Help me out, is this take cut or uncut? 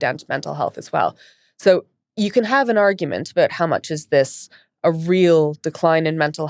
uncut